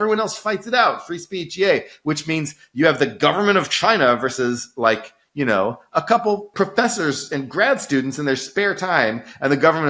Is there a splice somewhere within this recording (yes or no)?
yes